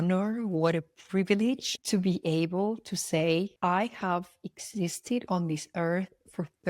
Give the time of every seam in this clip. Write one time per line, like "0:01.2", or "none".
0:03.5

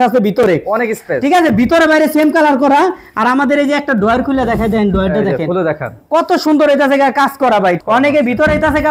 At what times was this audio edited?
none

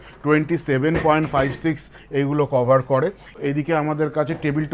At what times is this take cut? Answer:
0:03.3

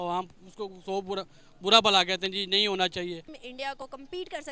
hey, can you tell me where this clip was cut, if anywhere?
0:03.4

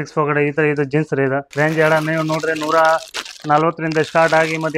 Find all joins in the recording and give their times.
0:01.5

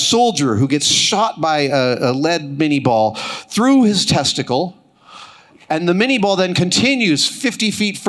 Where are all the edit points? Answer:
none

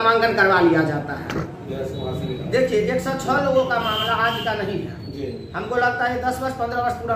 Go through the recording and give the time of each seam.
0:01.6

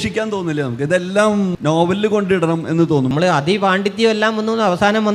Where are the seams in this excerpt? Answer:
0:01.5
0:03.1

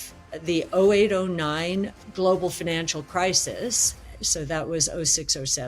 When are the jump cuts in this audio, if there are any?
0:02.0

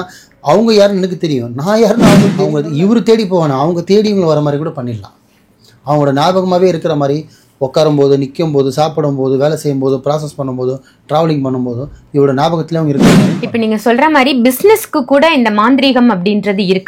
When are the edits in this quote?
0:02.4
0:13.4

